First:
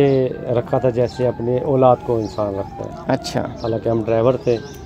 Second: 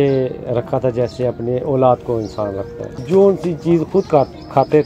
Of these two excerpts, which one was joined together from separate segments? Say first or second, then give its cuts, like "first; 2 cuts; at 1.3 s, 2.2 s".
second; 1 cut; at 2.9 s